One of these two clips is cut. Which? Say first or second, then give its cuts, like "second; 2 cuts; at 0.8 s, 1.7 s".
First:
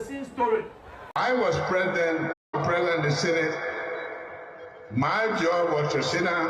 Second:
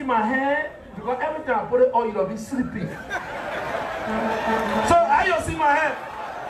first; 1 cut; at 2.5 s